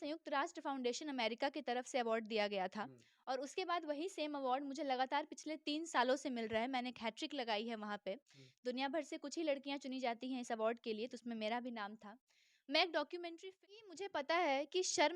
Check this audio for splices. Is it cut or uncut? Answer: cut